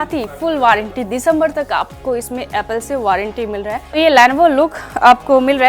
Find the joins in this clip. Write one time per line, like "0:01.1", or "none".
0:03.9